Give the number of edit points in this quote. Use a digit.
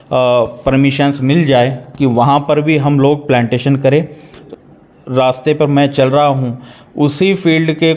1